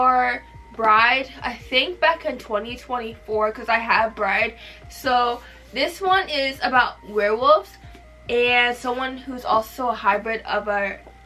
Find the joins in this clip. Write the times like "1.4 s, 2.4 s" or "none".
none